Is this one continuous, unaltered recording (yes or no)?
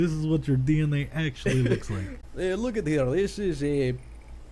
no